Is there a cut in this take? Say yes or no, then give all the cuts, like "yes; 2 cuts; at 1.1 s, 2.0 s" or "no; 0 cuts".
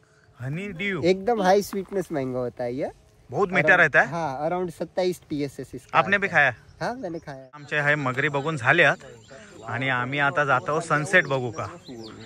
yes; 1 cut; at 7.7 s